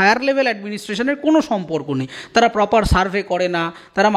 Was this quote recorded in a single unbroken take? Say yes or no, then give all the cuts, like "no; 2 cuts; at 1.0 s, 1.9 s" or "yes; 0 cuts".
yes; 0 cuts